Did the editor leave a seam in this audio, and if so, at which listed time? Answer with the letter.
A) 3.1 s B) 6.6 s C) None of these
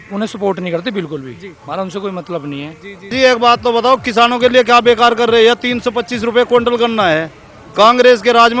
A